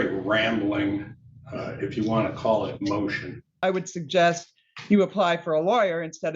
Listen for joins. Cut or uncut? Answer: cut